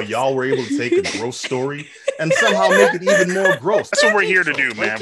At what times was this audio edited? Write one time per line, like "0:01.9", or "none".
0:03.9